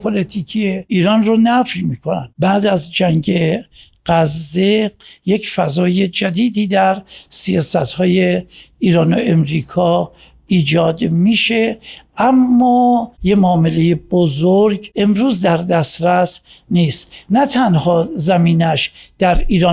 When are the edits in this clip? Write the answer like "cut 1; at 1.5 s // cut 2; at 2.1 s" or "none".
cut 1; at 0.9 s // cut 2; at 2.3 s // cut 3; at 13.1 s // cut 4; at 14.9 s